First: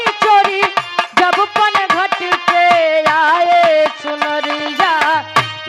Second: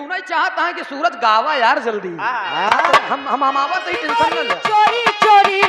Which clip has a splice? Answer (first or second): second